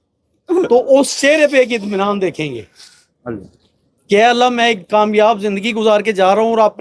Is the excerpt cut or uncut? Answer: uncut